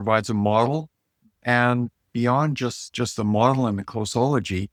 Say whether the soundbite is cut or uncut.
uncut